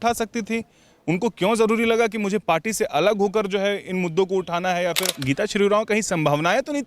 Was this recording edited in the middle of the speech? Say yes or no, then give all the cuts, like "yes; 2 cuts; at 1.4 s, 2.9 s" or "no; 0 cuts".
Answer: yes; 1 cut; at 5.1 s